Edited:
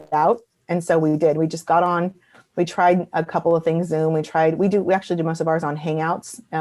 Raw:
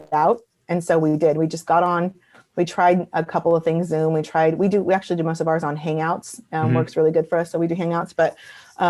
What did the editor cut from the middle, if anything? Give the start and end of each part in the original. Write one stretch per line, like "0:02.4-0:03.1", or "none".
none

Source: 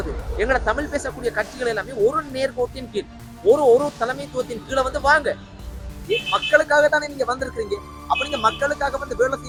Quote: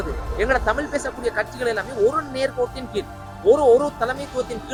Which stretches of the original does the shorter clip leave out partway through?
none

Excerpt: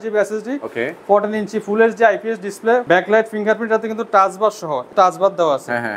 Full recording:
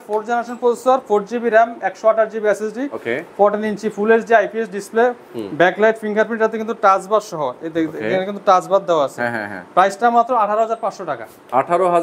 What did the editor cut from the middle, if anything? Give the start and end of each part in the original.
0:05.1-0:05.5
0:07.6-0:08.4

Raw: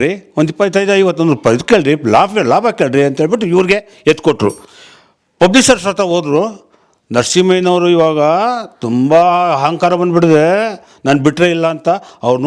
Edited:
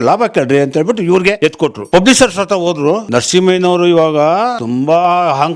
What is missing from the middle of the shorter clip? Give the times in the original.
0:03.9-0:04.9
0:06.5-0:07.1
0:08.6-0:08.8

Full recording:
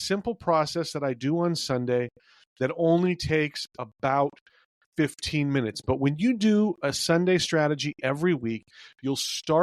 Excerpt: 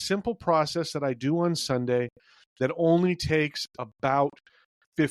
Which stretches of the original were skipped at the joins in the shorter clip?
none

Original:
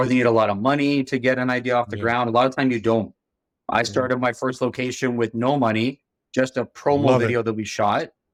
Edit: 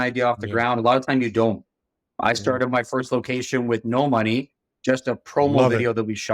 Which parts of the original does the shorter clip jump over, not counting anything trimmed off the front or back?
none

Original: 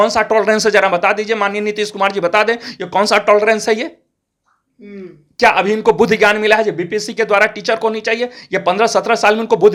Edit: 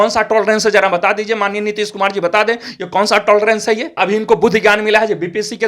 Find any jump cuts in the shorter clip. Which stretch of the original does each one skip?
0:04.0-0:05.5

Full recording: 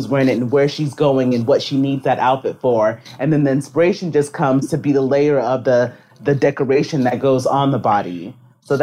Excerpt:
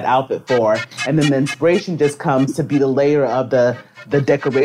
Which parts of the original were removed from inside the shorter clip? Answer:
none

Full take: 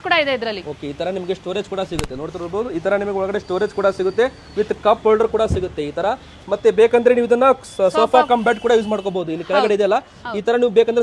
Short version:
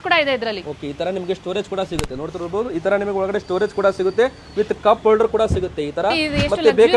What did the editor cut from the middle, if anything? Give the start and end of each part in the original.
none

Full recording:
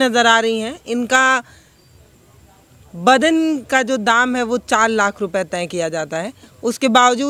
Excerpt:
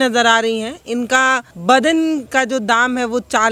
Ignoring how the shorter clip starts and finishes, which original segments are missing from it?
0:01.5-0:02.9

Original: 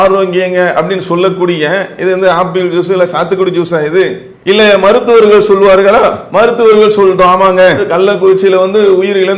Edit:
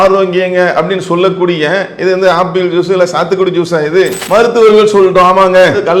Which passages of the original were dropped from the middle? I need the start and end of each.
0:04.2-0:06.2

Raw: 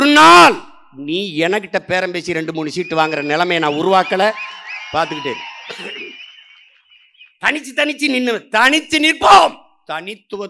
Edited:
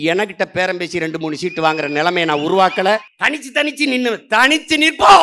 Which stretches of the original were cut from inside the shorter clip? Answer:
0:04.5-0:07.3

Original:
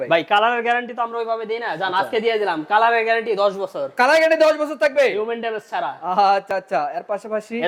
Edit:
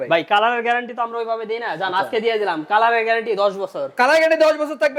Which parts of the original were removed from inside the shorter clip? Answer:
none

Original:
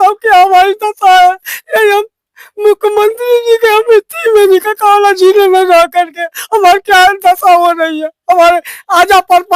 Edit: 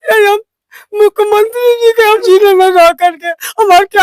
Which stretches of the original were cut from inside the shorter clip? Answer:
0:03.9-0:05.1

